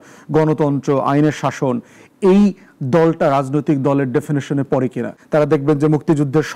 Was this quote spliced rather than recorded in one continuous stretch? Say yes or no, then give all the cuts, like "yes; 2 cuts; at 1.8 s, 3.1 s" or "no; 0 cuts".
yes; 1 cut; at 5.1 s